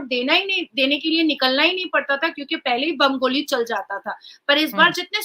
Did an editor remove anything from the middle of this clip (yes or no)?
no